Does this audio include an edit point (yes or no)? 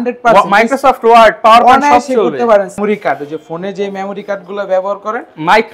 yes